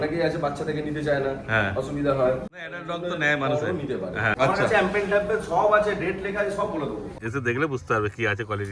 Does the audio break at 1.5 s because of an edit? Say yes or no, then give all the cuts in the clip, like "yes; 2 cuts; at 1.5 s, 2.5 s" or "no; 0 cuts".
no; 3 cuts; at 2.7 s, 4.3 s, 7.1 s